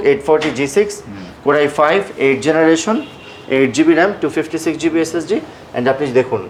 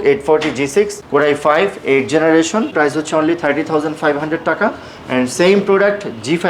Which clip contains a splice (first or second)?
second